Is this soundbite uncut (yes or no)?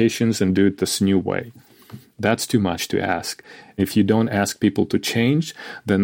no